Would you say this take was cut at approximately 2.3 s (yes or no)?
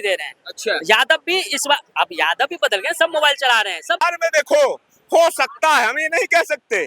no